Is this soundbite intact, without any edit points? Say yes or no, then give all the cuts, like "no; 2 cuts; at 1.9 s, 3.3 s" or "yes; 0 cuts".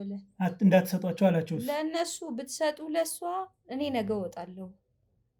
yes; 0 cuts